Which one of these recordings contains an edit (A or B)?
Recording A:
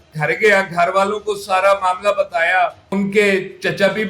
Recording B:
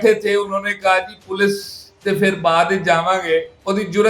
A